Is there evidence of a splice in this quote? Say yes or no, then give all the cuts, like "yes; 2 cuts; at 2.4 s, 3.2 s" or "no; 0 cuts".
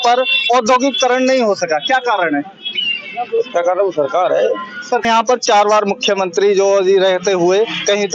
yes; 1 cut; at 5.0 s